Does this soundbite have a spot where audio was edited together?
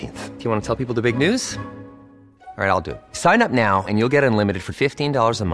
no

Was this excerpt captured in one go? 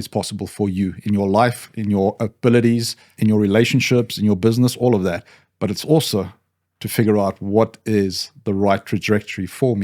no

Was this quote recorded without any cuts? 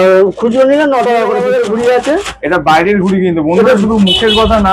no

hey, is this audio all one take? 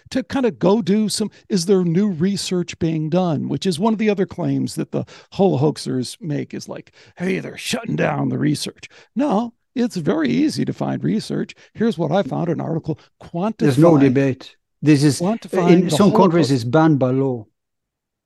yes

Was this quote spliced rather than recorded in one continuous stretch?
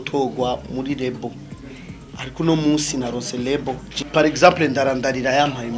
yes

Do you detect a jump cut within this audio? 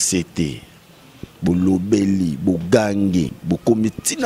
yes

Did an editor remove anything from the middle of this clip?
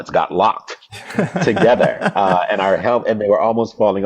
no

